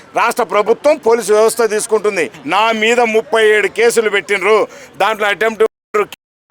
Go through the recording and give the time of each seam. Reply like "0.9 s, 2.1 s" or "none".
2.3 s

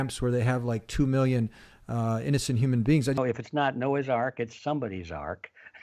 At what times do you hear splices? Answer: 3.2 s

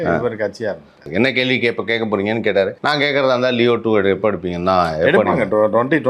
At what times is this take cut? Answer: 1.1 s, 2.8 s

